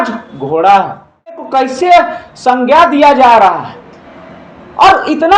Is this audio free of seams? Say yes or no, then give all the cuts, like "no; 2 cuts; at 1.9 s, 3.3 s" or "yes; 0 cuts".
no; 1 cut; at 1.4 s